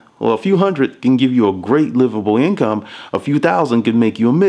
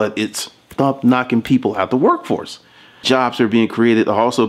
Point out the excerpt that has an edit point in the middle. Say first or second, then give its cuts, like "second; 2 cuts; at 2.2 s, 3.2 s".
second; 1 cut; at 3.0 s